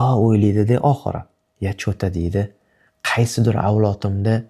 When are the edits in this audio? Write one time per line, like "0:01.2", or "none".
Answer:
none